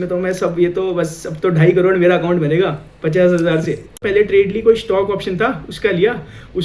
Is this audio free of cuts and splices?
no; 1 cut; at 4.0 s

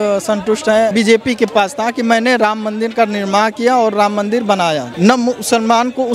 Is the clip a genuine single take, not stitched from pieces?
no; 2 cuts; at 0.9 s, 4.9 s

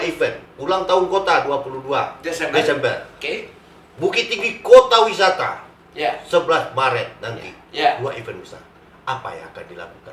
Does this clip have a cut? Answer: no; 0 cuts

